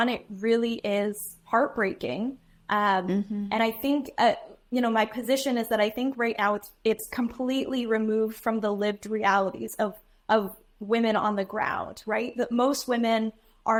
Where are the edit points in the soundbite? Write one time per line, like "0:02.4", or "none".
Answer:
none